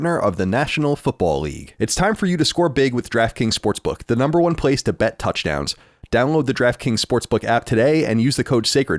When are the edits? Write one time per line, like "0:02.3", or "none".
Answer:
0:01.6